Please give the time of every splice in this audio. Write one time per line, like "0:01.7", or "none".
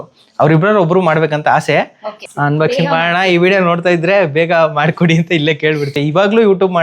0:02.3
0:05.9